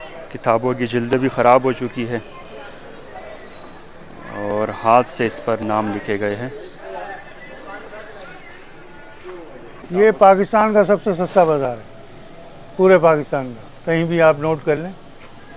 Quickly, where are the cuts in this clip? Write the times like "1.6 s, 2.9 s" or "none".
9.9 s